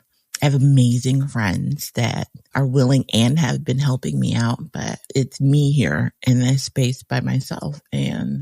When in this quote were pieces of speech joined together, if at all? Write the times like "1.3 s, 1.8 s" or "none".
5.0 s